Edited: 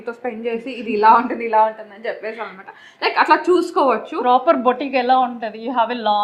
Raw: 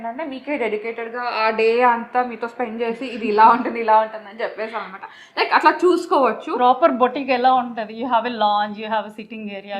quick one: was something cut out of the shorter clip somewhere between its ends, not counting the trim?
no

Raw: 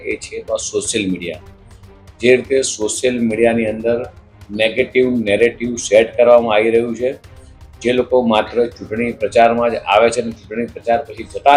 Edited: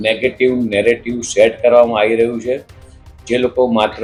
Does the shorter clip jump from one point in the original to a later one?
no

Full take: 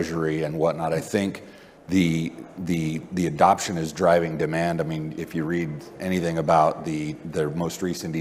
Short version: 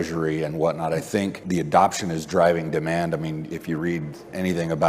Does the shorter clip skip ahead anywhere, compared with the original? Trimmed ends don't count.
yes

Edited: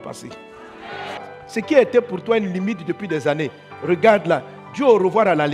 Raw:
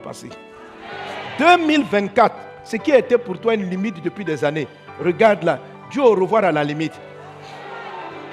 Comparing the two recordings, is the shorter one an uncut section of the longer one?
no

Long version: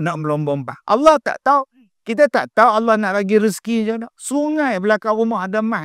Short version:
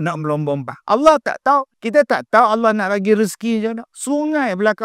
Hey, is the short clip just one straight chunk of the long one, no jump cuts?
no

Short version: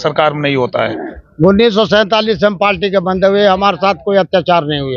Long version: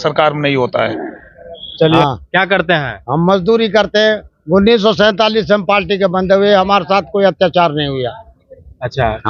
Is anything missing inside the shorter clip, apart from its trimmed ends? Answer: yes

